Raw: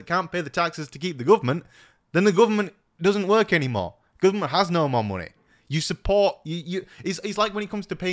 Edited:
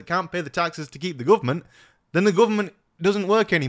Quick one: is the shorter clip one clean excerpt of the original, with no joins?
yes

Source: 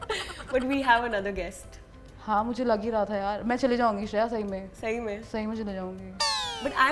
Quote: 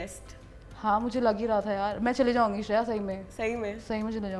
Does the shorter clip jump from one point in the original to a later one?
no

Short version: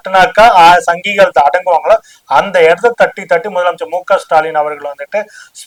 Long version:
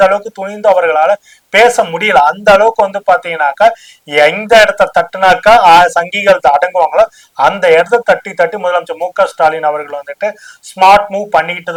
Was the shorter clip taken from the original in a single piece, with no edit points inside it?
yes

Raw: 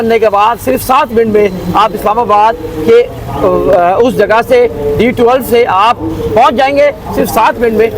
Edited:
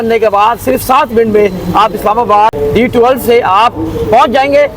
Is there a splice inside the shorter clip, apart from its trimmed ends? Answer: yes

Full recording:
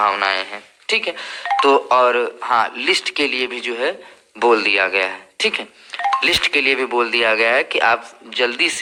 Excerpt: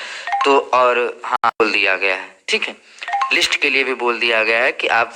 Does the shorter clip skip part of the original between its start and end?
yes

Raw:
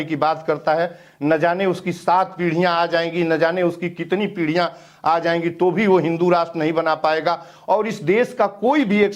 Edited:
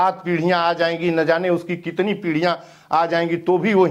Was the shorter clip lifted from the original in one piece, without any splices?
yes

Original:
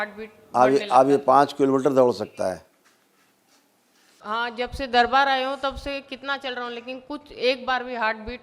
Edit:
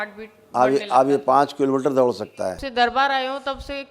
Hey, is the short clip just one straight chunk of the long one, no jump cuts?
no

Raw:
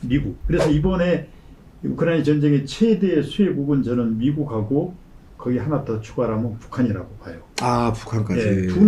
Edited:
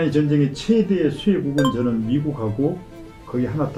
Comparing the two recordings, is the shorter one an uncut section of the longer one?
yes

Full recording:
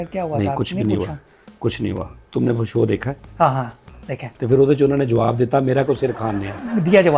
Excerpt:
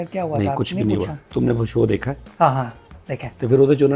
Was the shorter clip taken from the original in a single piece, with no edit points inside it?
no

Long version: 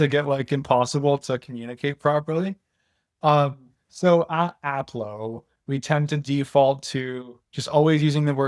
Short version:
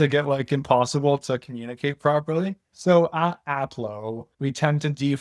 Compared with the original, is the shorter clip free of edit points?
no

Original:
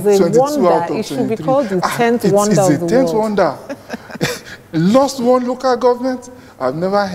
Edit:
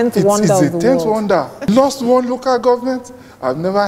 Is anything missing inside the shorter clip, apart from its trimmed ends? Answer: yes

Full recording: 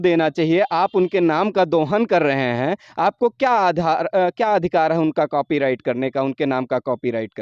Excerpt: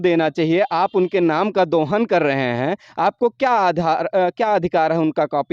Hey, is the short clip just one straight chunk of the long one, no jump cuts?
yes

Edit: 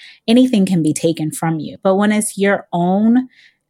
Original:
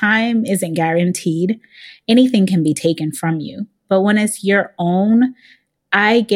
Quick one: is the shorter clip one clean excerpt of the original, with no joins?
no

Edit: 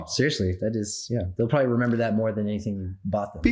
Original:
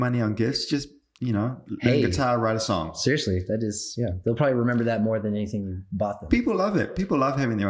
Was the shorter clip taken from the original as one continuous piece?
yes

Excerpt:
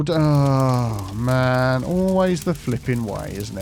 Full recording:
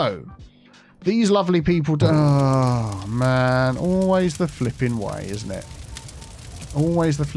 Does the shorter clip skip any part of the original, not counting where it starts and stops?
no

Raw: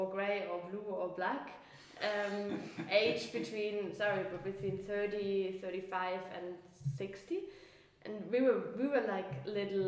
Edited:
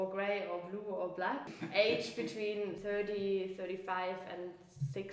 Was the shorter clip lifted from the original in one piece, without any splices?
no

